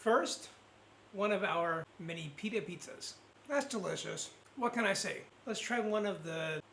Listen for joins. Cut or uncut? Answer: cut